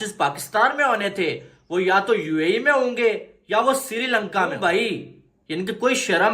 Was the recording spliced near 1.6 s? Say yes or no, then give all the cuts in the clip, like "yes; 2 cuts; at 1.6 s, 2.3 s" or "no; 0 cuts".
no; 1 cut; at 4.5 s